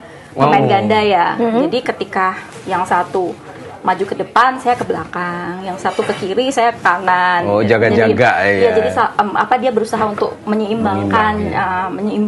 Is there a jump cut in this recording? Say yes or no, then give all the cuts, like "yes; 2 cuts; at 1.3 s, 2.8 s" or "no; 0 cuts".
no; 0 cuts